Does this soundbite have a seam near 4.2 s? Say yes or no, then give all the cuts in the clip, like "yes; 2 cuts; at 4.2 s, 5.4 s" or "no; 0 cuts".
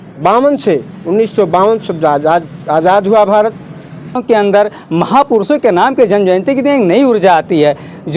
yes; 1 cut; at 4.2 s